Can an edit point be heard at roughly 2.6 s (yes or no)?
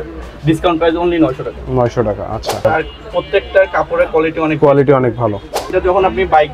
yes